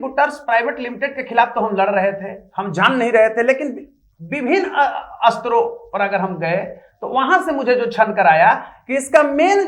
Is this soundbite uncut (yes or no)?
yes